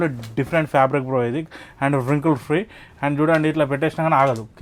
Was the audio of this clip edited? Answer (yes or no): no